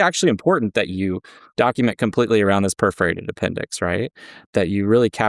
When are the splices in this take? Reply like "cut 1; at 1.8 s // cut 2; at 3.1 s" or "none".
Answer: cut 1; at 4.4 s